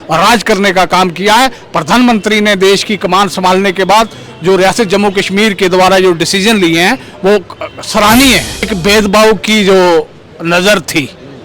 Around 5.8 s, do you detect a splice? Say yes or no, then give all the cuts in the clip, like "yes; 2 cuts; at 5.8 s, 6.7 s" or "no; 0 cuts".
no; 1 cut; at 8.7 s